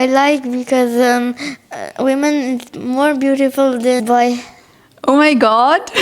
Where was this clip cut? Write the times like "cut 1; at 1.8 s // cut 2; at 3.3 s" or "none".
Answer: cut 1; at 4.0 s